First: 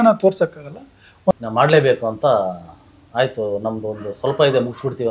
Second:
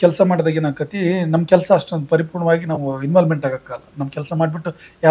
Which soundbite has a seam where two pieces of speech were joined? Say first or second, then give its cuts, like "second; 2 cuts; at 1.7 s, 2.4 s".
first; 1 cut; at 1.3 s